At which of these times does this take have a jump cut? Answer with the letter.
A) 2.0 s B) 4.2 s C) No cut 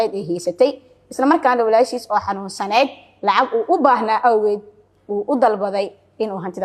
C